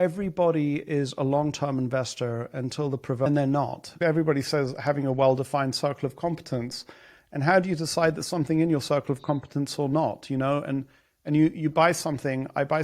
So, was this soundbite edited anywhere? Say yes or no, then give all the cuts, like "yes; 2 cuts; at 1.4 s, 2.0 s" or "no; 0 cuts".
yes; 1 cut; at 3.8 s